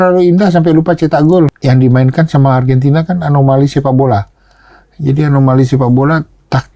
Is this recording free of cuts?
no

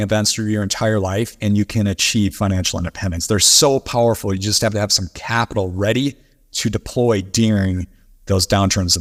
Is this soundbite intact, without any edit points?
yes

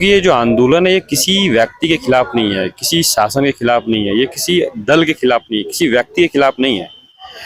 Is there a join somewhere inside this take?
no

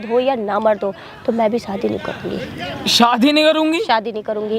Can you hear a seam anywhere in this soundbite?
no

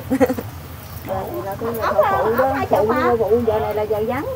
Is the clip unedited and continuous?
no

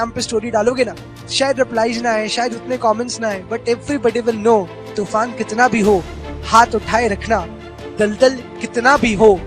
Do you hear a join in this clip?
yes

